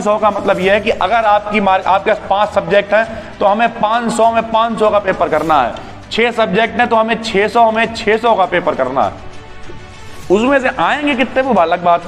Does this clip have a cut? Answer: no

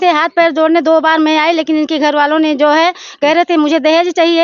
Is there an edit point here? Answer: no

